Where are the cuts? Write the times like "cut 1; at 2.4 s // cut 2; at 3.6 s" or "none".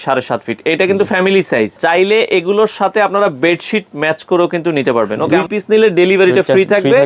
cut 1; at 1.8 s // cut 2; at 5.2 s